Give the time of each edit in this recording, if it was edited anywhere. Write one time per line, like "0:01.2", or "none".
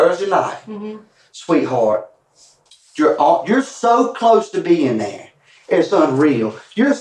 none